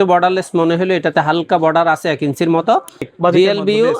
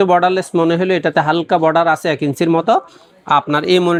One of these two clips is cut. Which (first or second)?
first